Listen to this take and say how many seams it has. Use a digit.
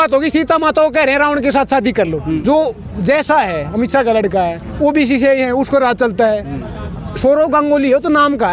1